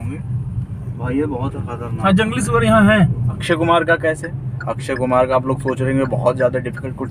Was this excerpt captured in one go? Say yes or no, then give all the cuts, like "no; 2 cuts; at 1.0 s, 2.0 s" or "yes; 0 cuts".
no; 1 cut; at 3.4 s